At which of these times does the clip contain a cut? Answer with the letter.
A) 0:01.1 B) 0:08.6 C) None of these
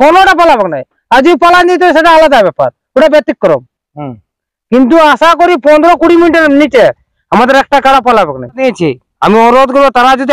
B